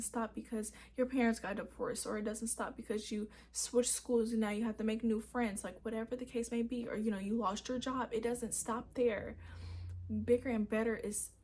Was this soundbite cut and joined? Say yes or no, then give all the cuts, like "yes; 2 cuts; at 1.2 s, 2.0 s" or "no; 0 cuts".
no; 0 cuts